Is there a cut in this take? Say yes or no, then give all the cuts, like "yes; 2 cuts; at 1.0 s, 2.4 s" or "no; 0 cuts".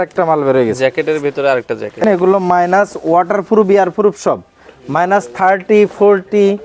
yes; 1 cut; at 2.0 s